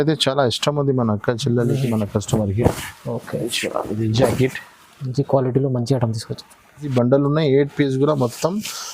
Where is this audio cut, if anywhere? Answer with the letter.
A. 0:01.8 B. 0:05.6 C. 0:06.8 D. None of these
C